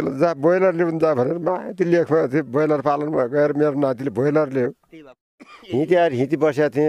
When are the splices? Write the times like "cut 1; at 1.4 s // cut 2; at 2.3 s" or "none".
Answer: cut 1; at 5.2 s